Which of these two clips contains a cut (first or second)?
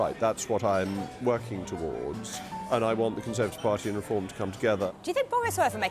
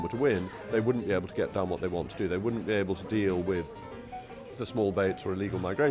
first